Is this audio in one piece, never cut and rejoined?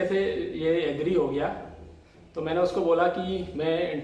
yes; 0 cuts

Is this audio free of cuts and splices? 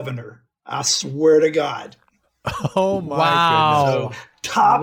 yes; 0 cuts

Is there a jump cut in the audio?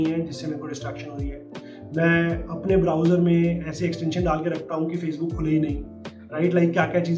no; 0 cuts

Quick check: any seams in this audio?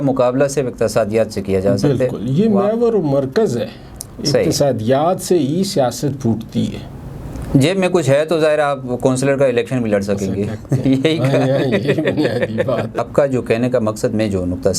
yes; 1 cut; at 13.0 s

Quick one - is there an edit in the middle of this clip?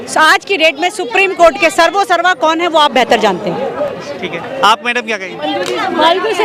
no; 0 cuts

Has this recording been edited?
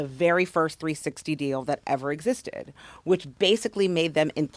no; 0 cuts

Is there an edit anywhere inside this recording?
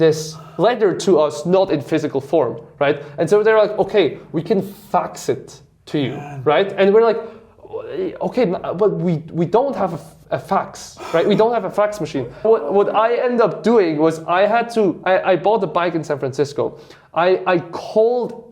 yes; 1 cut; at 12.4 s

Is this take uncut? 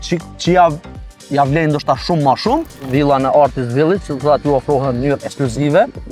no; 1 cut; at 2.8 s

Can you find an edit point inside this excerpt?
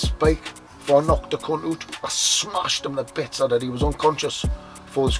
yes; 1 cut; at 1.9 s

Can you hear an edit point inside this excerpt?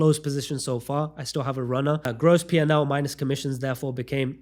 no; 0 cuts

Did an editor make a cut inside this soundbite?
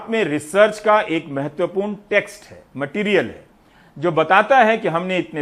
no; 0 cuts

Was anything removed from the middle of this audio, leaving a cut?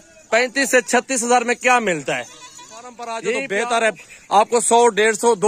yes; 1 cut; at 3.2 s

